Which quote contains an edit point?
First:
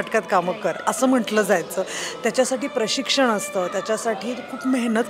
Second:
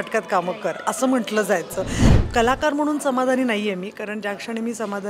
second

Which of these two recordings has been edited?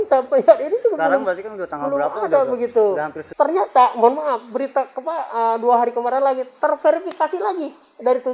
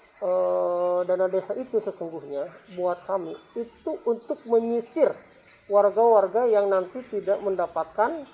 first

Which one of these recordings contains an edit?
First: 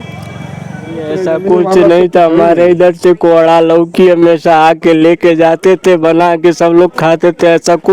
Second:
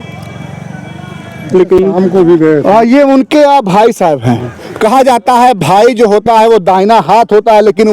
first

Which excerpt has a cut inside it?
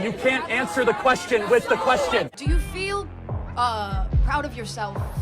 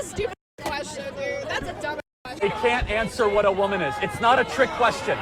first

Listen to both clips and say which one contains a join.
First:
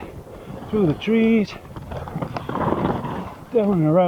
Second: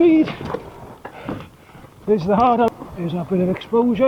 second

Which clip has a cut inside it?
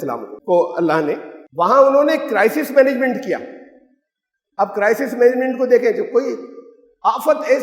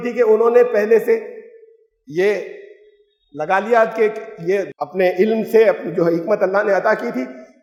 first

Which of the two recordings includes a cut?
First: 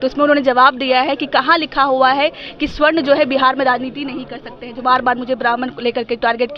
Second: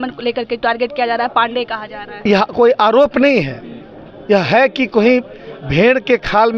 second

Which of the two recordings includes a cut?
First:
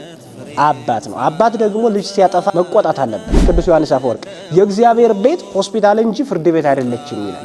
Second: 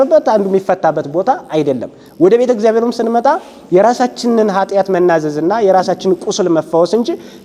first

